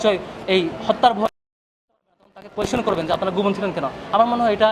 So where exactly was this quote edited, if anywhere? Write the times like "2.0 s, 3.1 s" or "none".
none